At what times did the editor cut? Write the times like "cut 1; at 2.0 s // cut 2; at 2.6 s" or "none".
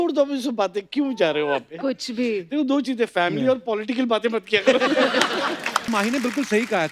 cut 1; at 5.9 s